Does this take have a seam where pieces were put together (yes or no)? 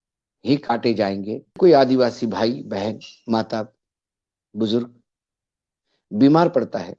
yes